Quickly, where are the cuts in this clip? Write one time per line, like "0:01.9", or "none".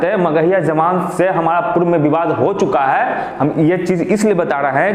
none